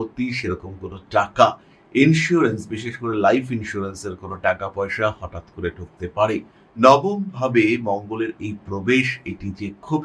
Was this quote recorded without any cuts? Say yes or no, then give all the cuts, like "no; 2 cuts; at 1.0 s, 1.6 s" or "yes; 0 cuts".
no; 1 cut; at 6.6 s